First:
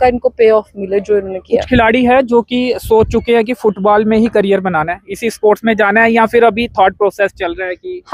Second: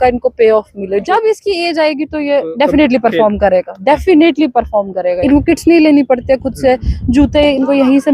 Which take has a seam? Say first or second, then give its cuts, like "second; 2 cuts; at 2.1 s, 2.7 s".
second; 2 cuts; at 1.0 s, 5.2 s